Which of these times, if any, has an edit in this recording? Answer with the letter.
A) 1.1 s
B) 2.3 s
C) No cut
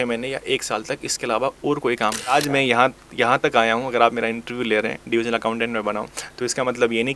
B